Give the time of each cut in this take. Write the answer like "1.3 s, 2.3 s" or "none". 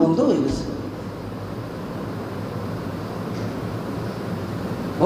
none